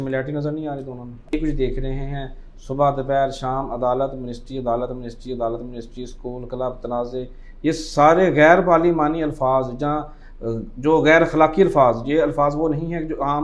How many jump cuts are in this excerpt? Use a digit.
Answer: 1